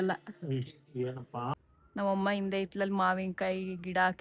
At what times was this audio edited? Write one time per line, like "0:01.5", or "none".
0:01.5